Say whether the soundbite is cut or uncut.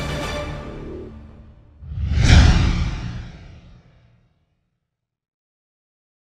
uncut